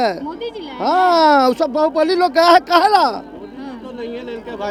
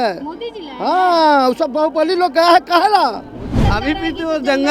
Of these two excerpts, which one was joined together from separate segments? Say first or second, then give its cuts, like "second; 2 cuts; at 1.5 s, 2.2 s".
second; 1 cut; at 3.5 s